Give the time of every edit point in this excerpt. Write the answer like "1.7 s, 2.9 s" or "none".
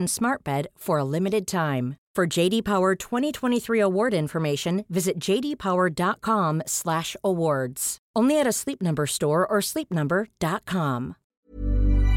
11.2 s